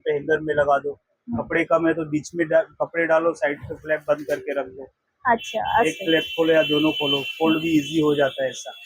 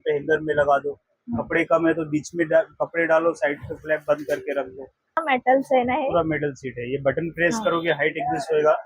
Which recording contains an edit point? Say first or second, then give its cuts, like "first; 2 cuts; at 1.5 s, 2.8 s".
second; 1 cut; at 5.2 s